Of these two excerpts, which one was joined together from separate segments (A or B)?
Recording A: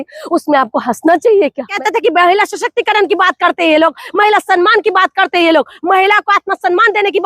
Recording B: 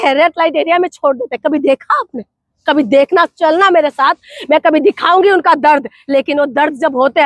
A